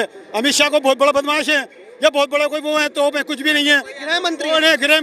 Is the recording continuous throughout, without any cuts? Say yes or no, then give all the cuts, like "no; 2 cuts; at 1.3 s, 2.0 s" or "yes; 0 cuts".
yes; 0 cuts